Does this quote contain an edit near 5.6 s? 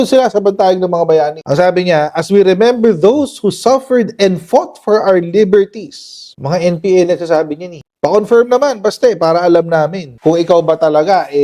no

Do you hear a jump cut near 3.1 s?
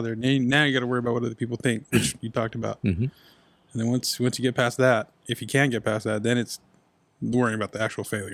no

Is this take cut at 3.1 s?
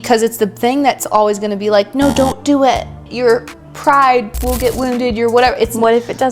yes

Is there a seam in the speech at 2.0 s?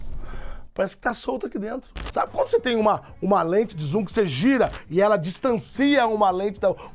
yes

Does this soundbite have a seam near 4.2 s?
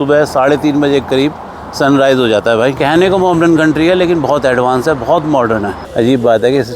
no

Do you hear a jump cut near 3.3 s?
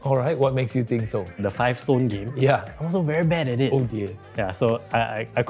no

